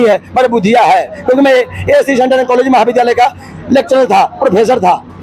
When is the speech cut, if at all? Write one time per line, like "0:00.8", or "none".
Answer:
none